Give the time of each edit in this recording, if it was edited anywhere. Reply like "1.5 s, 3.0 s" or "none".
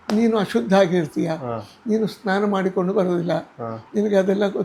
none